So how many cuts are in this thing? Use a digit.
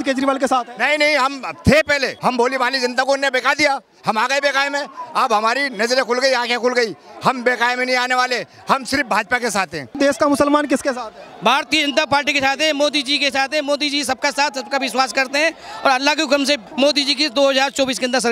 3